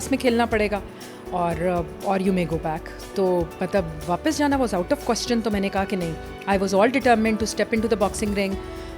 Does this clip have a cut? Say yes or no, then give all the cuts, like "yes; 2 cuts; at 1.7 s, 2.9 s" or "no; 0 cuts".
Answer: no; 0 cuts